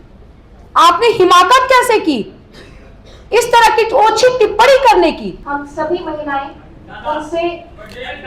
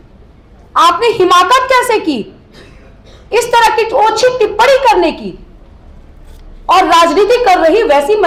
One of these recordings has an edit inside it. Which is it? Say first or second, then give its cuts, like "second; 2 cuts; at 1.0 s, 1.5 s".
first; 1 cut; at 5.4 s